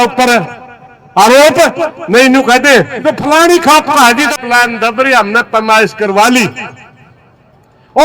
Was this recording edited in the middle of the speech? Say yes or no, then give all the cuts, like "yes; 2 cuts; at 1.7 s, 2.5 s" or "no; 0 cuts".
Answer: yes; 1 cut; at 4.4 s